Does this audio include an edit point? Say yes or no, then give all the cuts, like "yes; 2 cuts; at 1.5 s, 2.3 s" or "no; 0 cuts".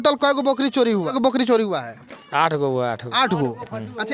yes; 1 cut; at 1.1 s